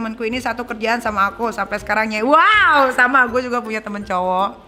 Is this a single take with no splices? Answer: yes; 0 cuts

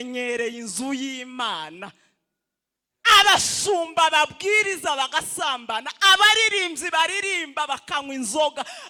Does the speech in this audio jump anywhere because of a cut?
no; 0 cuts

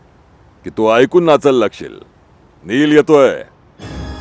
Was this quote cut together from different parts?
no; 0 cuts

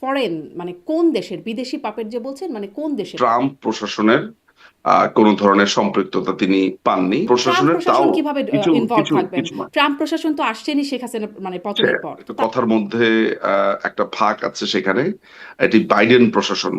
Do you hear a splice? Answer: yes; 3 cuts; at 3.1 s, 7.3 s, 12.3 s

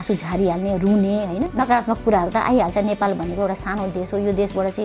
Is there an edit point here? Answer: yes; 1 cut; at 1.3 s

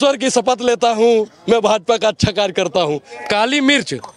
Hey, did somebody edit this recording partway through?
yes; 1 cut; at 3.1 s

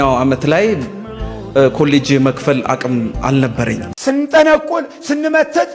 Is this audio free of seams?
no; 1 cut; at 3.9 s

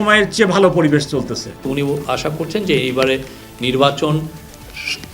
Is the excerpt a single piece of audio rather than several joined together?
no; 1 cut; at 1.6 s

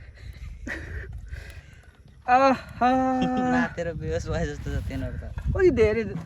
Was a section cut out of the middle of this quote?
no; 0 cuts

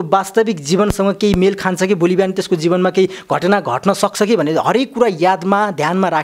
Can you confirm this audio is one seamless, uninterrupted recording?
yes; 0 cuts

